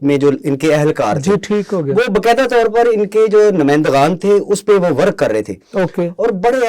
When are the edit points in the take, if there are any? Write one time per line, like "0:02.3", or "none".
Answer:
none